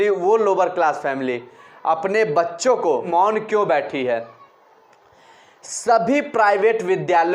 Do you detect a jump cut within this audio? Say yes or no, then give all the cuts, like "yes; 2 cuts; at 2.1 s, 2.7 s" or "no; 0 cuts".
yes; 1 cut; at 3.1 s